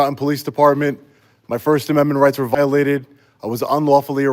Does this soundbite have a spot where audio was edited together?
no; 0 cuts

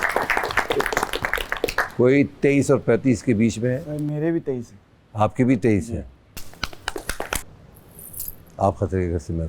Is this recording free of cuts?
no; 1 cut; at 7.4 s

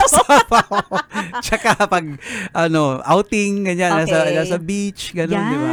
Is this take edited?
no; 0 cuts

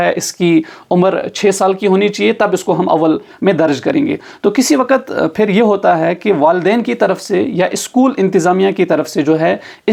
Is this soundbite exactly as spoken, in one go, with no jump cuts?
yes; 0 cuts

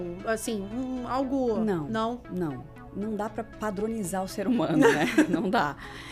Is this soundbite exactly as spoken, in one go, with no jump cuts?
yes; 0 cuts

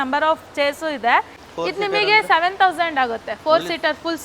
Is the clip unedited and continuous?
no; 1 cut; at 1.4 s

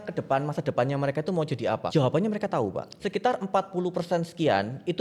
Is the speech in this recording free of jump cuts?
no; 2 cuts; at 1.8 s, 2.9 s

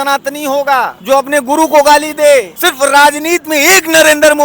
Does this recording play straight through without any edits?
no; 2 cuts; at 1.0 s, 2.6 s

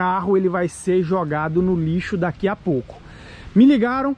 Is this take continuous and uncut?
yes; 0 cuts

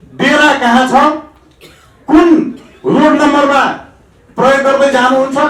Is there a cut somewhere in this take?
no; 0 cuts

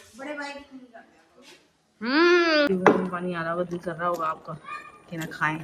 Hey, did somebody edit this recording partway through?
yes; 1 cut; at 2.7 s

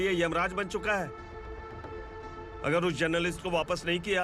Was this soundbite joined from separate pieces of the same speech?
no; 0 cuts

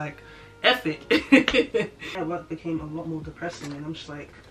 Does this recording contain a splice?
yes; 1 cut; at 2.0 s

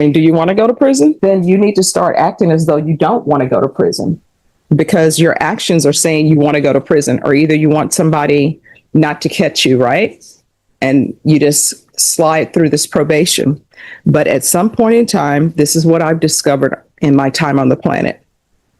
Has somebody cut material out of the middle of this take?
yes; 1 cut; at 1.2 s

